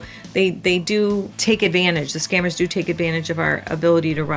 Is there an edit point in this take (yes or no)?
yes